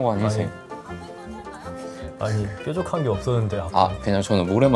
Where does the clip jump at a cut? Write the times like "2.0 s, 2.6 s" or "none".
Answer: none